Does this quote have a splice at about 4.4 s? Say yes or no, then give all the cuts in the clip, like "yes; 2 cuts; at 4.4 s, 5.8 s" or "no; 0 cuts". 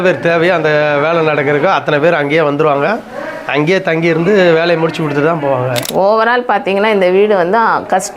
no; 1 cut; at 5.8 s